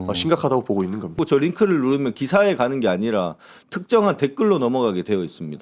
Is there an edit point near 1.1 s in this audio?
yes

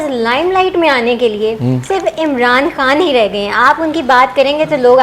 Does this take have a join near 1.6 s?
no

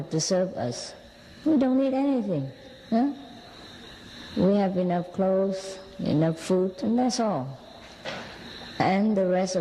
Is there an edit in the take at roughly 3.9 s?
no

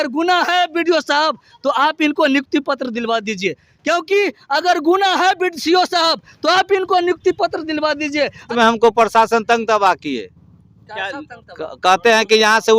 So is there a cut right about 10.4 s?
no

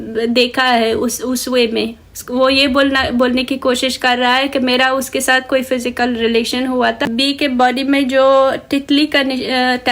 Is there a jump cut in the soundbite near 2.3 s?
no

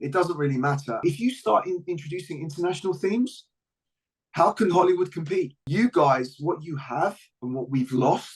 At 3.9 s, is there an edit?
no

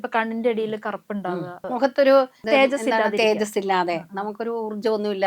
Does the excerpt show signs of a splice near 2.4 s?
yes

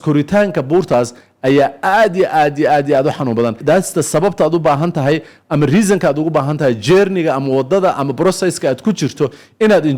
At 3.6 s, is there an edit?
yes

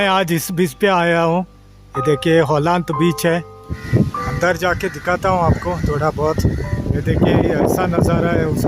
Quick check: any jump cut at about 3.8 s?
yes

